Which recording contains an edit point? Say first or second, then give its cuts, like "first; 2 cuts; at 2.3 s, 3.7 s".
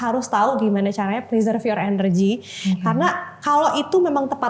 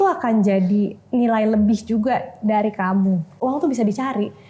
second; 1 cut; at 3.4 s